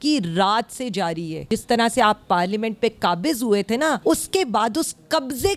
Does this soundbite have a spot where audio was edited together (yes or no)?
yes